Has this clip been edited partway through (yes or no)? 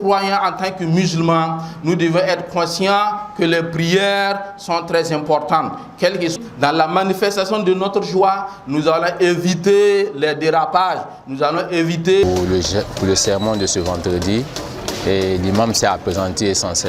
yes